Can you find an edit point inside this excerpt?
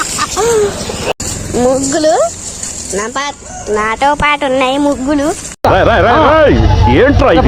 yes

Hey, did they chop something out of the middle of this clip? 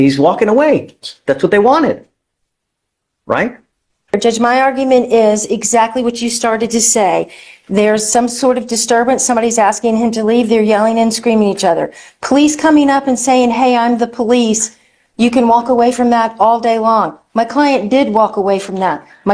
yes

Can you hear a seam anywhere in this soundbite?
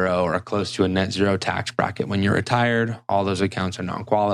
no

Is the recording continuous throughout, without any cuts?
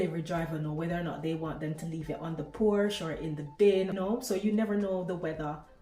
no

